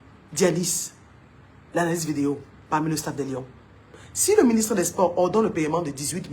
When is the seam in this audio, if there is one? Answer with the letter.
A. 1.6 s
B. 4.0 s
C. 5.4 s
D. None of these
B